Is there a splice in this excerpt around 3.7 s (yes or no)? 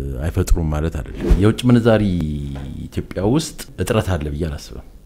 yes